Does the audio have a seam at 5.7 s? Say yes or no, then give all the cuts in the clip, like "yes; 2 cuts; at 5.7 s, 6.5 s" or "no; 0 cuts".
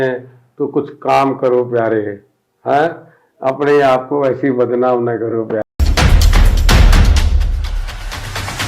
yes; 1 cut; at 5.7 s